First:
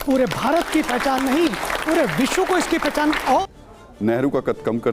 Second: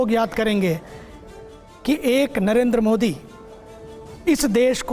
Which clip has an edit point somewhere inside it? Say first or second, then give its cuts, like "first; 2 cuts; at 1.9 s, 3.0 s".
first; 1 cut; at 3.4 s